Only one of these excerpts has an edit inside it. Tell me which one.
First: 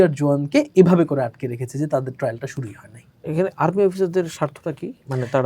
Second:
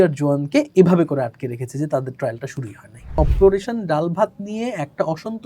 second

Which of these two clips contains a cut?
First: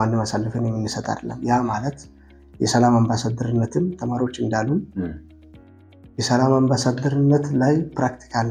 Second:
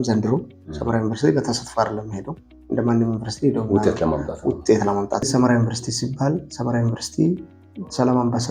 second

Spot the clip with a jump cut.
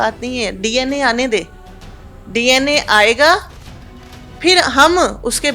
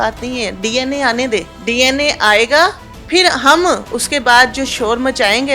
second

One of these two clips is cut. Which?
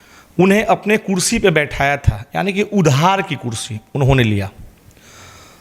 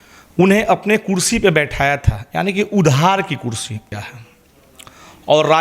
second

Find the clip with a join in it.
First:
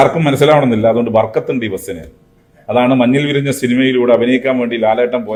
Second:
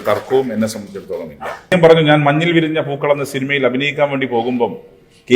second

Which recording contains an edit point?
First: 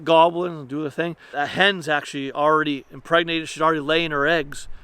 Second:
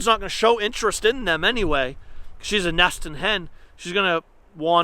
first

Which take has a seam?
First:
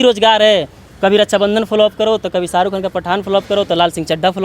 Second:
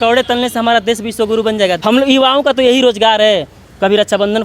second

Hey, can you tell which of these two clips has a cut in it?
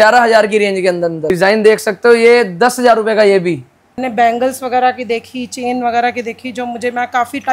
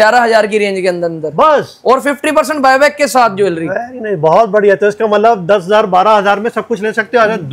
first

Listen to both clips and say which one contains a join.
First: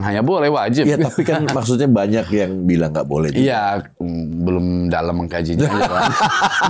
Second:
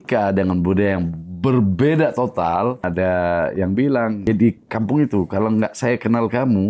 second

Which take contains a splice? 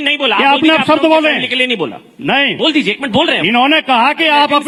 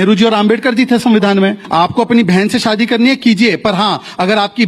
second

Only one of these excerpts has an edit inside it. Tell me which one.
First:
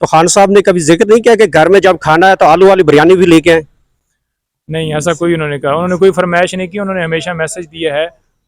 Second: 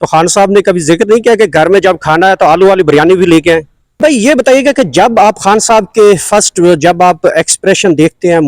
second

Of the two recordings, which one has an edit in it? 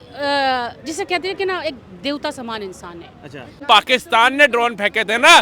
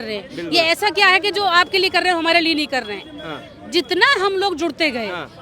first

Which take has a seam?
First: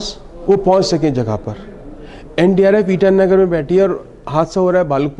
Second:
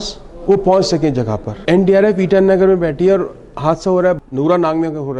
second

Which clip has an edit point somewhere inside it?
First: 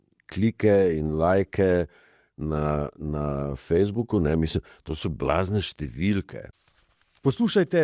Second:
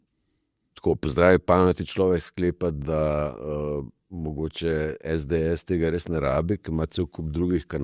first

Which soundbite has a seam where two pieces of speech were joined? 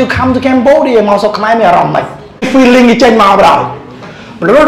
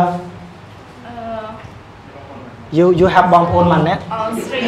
first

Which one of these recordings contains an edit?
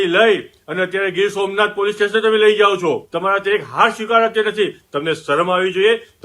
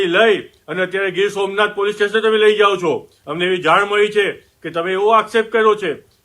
first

